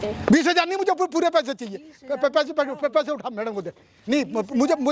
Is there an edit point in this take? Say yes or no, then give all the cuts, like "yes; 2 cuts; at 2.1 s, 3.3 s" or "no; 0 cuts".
no; 0 cuts